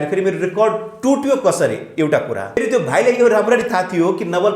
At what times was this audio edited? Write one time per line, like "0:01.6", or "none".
0:02.6